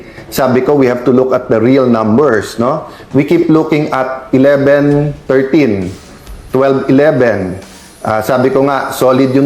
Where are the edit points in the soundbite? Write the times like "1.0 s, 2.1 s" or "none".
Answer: none